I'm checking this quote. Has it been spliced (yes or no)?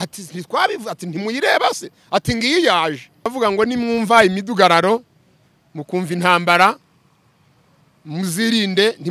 yes